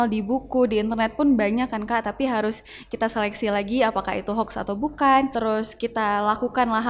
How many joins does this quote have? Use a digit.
1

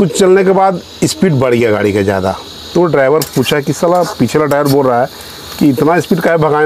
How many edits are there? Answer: 0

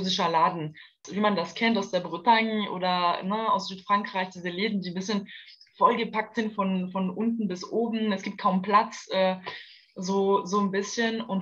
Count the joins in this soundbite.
1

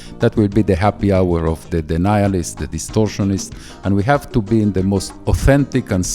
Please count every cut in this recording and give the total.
1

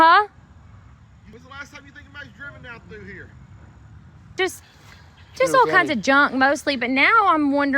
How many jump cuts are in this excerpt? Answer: 2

